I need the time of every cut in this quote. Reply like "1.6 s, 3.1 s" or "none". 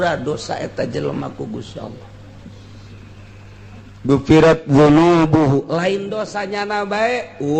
3.3 s